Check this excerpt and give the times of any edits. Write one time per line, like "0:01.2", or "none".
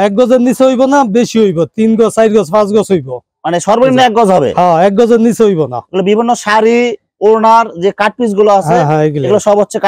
none